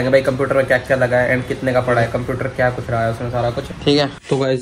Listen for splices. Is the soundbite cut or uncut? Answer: uncut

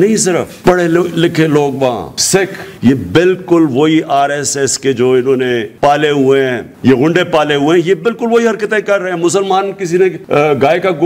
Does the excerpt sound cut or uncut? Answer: cut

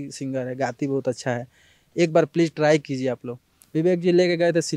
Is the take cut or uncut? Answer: cut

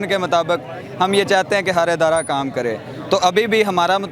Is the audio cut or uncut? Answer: uncut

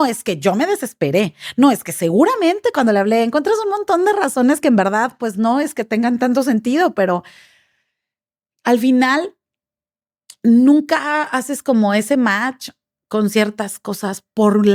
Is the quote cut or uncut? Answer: uncut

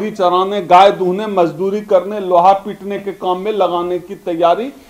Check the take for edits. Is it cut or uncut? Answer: uncut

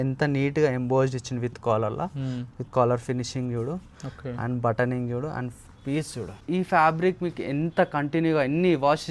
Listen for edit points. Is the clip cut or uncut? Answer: uncut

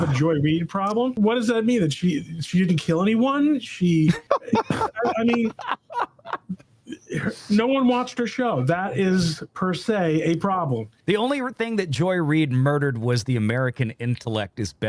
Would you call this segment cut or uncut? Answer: cut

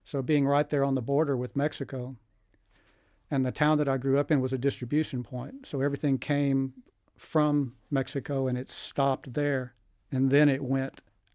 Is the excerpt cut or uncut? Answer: uncut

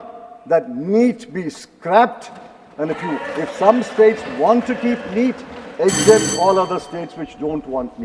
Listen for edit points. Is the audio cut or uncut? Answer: uncut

